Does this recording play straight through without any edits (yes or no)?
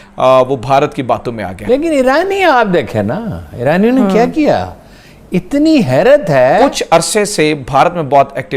no